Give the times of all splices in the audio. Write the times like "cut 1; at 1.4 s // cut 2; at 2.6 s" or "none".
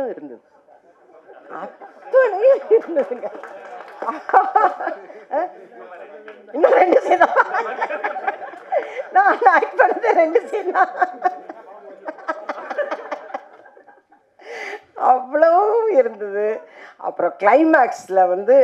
none